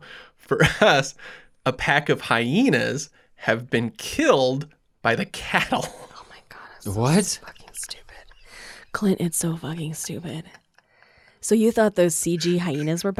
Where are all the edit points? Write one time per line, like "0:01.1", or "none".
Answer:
none